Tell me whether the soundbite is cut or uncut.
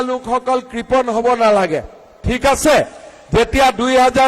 uncut